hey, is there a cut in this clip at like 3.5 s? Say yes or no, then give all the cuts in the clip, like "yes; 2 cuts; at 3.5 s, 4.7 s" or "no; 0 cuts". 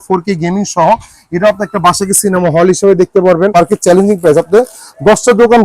yes; 1 cut; at 3.5 s